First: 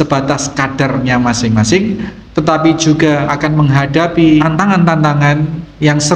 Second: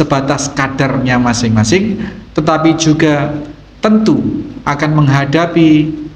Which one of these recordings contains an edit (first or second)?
first